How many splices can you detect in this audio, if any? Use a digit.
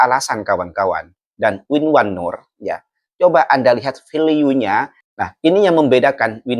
1